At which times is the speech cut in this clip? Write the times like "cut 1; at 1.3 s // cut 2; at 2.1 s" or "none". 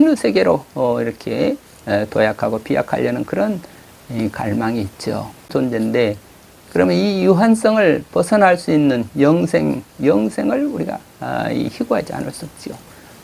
cut 1; at 5.5 s